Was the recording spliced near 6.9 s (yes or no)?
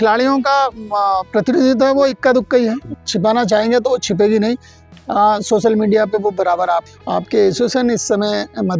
yes